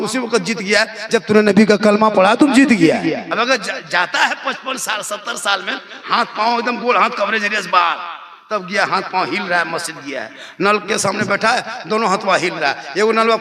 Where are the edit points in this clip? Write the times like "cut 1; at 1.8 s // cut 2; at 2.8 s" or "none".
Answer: cut 1; at 3.3 s